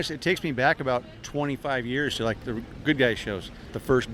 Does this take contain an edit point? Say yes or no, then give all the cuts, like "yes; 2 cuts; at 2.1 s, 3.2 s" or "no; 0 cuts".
no; 0 cuts